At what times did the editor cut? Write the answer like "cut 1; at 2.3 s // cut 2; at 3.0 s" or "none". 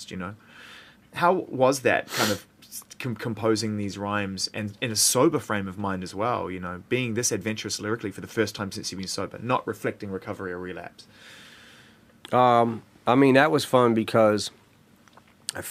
none